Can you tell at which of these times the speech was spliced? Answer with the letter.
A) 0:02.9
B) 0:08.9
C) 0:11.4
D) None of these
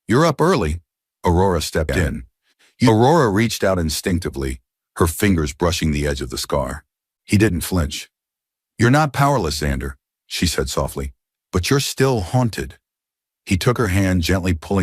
A